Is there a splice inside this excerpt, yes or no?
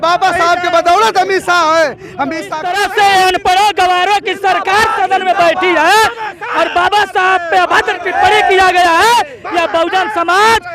yes